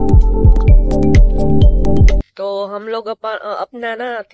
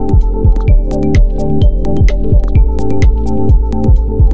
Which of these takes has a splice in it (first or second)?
first